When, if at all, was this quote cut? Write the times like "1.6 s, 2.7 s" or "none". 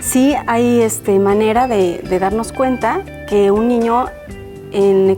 none